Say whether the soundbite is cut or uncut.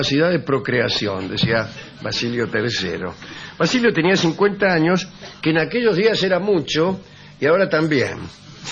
uncut